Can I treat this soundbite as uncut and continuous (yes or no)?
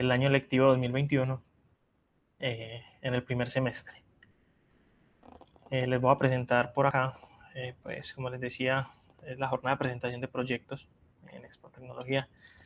no